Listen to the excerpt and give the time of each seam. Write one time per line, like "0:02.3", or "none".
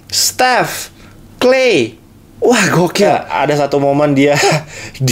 0:03.1